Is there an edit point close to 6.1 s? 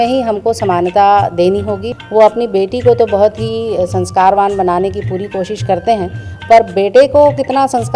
no; 1 cut; at 1.8 s

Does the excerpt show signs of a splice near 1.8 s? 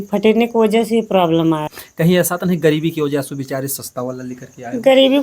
yes; 1 cut; at 1.8 s

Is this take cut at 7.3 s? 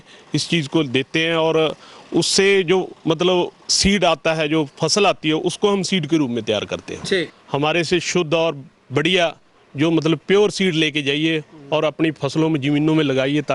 yes; 1 cut; at 7.3 s

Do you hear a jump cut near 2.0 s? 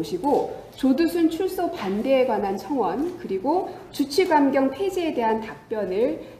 no; 1 cut; at 4.4 s

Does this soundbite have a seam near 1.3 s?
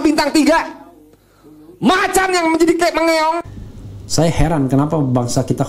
no; 1 cut; at 3.4 s

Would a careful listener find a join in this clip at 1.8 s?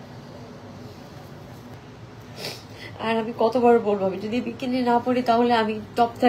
yes; 1 cut; at 1.8 s

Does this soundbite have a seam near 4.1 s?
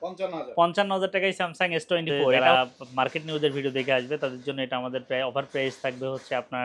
no; 1 cut; at 2.5 s

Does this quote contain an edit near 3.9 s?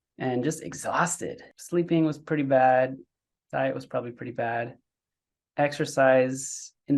no; 1 cut; at 1.5 s

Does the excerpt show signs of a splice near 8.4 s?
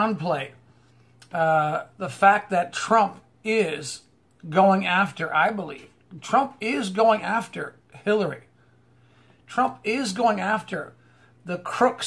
yes; 1 cut; at 8.4 s

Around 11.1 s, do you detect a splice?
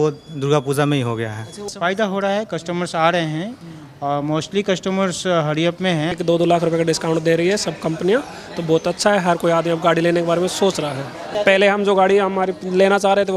yes; 3 cuts; at 1.7 s, 6.1 s, 11.1 s

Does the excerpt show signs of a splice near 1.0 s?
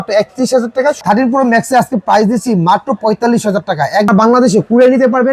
yes; 2 cuts; at 1.0 s, 4.1 s

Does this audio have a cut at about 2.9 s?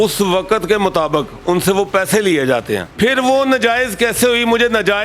yes; 1 cut; at 2.9 s

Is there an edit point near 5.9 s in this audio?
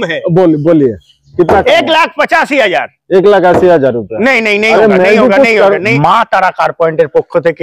yes; 1 cut; at 5.9 s

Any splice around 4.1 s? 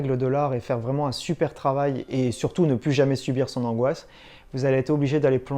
no; 0 cuts

